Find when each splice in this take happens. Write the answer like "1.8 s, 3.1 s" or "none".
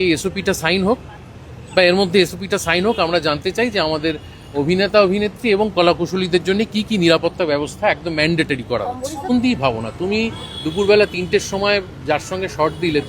9.3 s